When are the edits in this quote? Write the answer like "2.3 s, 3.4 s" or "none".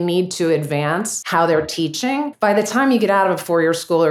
1.2 s, 2.3 s